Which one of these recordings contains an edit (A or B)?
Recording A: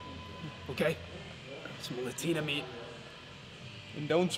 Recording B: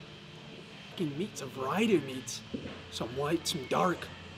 B